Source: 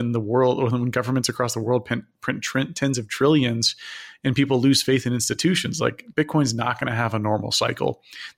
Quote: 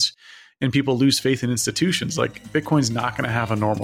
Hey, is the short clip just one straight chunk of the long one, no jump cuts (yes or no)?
yes